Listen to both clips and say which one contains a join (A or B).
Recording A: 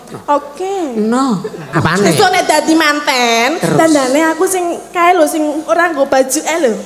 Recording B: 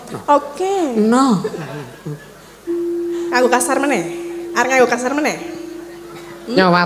A